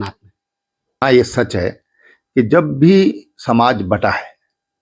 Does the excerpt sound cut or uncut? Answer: cut